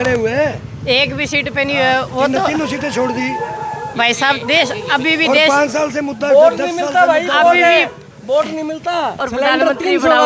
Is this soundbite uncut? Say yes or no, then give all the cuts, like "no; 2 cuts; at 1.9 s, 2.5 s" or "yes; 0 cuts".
no; 1 cut; at 9.2 s